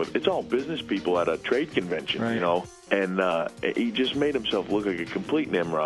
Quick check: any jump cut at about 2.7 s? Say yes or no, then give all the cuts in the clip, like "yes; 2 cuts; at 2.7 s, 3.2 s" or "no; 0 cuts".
yes; 1 cut; at 2.7 s